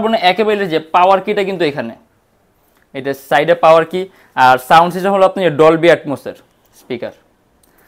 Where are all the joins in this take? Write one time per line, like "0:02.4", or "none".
none